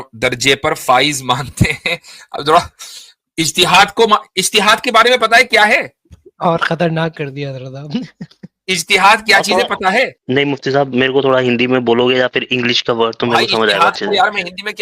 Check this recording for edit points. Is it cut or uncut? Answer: cut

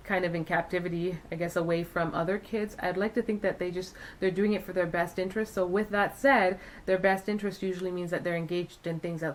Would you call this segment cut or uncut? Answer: uncut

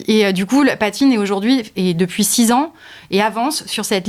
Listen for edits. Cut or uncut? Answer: uncut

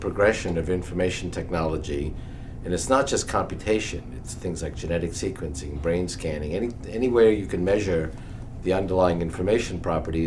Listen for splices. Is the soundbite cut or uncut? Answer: cut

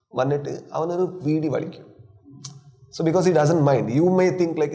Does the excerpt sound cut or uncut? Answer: uncut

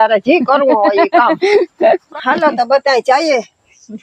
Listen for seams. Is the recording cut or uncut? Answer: cut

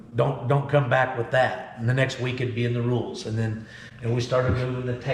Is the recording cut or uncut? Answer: uncut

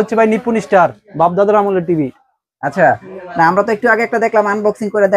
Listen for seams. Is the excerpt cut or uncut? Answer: uncut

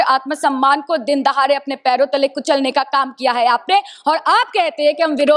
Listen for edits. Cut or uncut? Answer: uncut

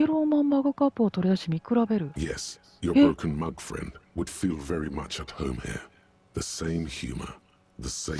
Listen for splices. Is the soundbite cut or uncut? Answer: uncut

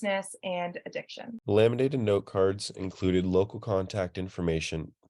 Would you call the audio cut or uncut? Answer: cut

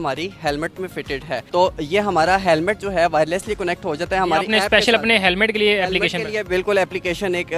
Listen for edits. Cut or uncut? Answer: uncut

